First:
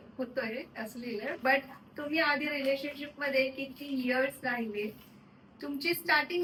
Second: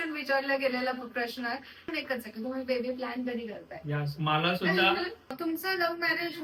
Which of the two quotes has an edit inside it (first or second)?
second